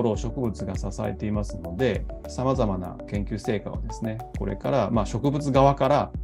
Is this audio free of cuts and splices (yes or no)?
no